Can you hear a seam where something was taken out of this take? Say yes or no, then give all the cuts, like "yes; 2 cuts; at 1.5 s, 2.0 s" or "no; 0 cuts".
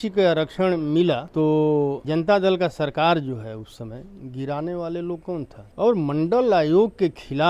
yes; 3 cuts; at 1.3 s, 2.0 s, 5.6 s